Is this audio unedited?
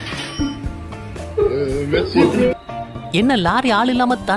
no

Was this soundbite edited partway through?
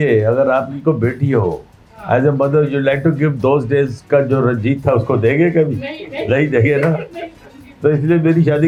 no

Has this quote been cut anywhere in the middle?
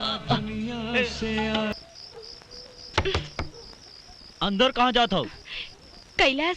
yes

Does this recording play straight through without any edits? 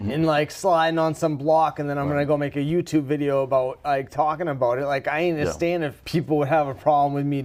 yes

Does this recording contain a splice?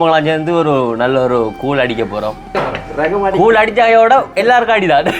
yes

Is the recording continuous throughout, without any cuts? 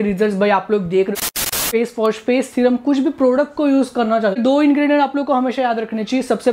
no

